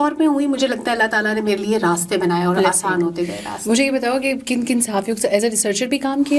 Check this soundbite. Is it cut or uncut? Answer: uncut